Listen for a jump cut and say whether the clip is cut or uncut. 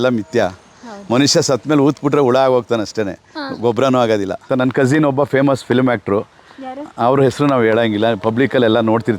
cut